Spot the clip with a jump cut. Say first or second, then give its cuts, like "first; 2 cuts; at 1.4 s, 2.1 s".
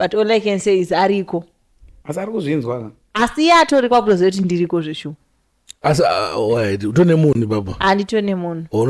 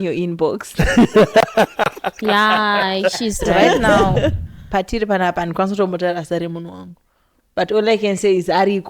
second; 1 cut; at 4.5 s